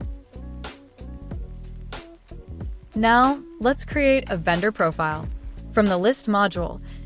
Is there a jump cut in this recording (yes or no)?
no